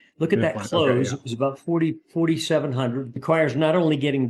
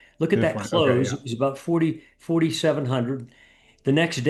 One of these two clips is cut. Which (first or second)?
first